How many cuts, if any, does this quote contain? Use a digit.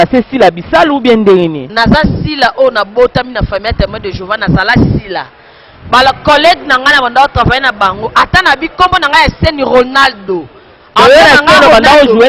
1